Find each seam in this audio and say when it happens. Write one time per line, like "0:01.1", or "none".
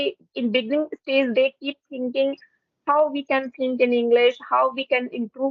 none